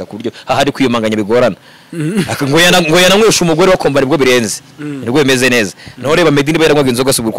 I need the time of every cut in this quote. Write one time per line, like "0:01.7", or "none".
none